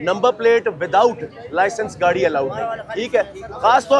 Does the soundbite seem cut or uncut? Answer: uncut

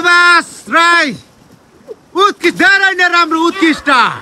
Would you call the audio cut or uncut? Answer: uncut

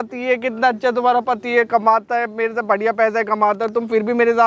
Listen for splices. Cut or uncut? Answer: uncut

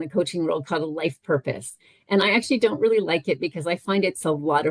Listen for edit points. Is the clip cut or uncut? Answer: uncut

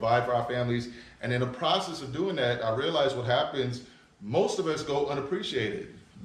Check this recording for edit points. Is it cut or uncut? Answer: uncut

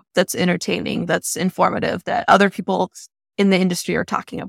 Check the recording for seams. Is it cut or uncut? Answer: uncut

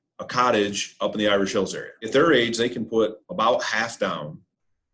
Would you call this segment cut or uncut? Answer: cut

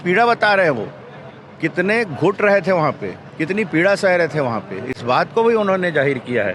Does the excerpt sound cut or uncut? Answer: uncut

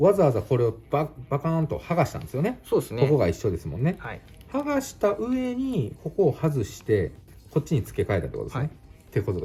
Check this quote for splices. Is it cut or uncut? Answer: uncut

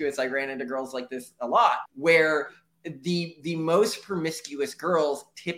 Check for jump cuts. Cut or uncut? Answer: uncut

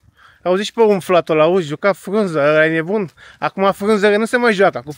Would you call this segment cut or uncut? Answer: uncut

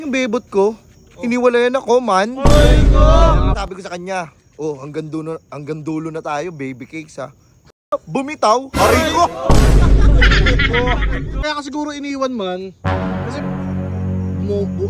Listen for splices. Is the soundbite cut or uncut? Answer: cut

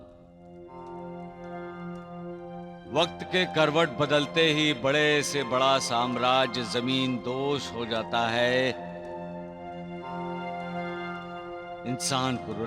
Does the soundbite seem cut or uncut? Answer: uncut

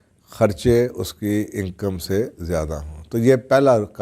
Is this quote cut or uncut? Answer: uncut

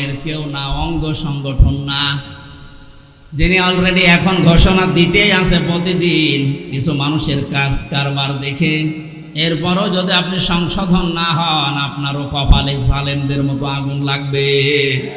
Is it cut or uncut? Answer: uncut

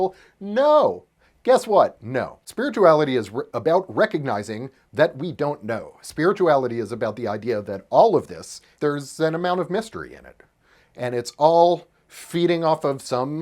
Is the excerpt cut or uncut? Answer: cut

